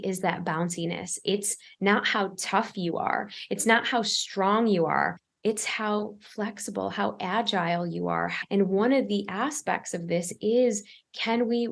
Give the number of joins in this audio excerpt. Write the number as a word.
two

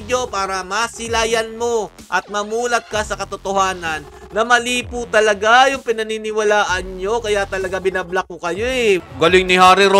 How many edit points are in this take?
one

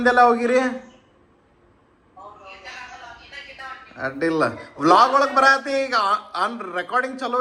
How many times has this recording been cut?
zero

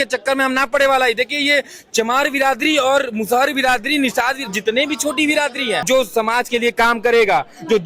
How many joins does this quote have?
one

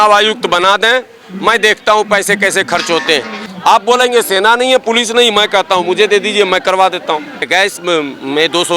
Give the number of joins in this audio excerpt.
two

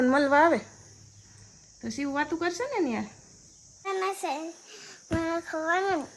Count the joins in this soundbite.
one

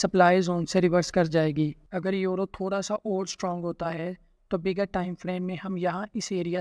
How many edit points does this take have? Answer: one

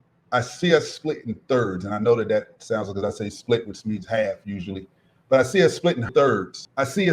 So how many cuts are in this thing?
one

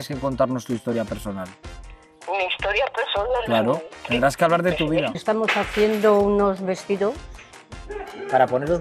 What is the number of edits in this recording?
one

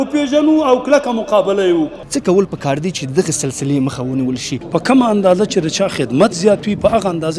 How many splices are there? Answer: two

